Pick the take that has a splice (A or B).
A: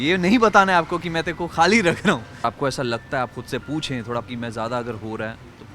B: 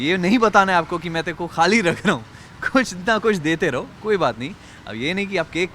A